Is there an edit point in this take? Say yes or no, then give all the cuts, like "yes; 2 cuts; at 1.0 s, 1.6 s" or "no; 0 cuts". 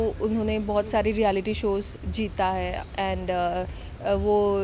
no; 0 cuts